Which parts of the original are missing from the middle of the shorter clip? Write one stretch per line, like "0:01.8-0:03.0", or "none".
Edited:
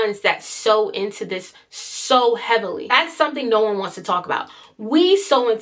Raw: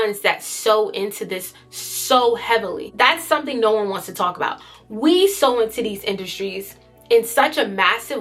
0:02.9-0:03.0